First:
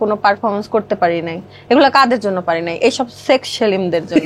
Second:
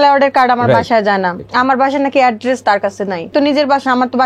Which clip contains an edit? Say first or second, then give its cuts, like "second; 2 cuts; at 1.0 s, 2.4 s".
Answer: second; 2 cuts; at 1.4 s, 3.3 s